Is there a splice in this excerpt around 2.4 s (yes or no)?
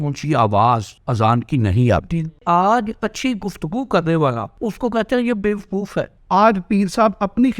yes